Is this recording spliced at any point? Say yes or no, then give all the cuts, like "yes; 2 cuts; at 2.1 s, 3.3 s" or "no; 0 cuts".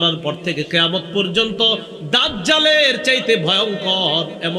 no; 0 cuts